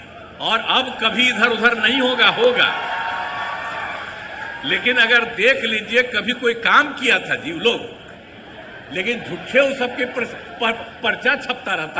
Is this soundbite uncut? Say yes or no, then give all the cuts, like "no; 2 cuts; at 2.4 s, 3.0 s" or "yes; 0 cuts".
yes; 0 cuts